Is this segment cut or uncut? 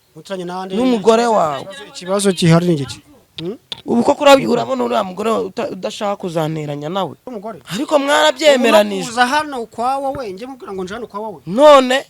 cut